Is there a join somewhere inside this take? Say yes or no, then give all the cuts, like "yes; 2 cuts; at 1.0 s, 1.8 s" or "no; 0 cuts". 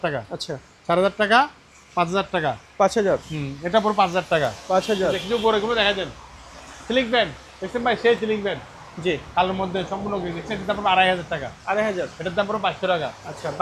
no; 0 cuts